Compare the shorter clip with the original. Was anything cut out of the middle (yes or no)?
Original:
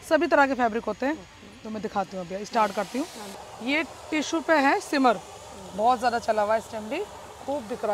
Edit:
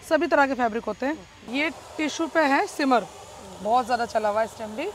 yes